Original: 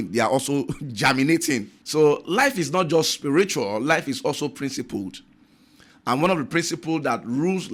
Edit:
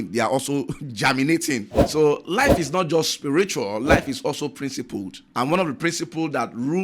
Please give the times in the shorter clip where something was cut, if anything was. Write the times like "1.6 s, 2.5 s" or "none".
5.2 s